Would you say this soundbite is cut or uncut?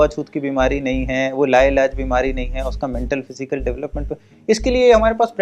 uncut